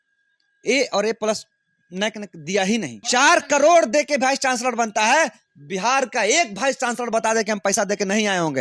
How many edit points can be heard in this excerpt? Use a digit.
1